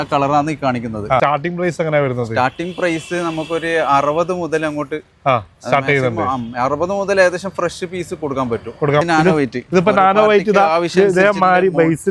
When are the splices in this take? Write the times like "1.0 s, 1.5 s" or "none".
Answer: 1.2 s, 9.0 s